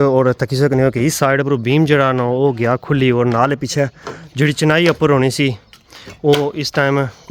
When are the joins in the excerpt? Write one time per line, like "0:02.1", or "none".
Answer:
none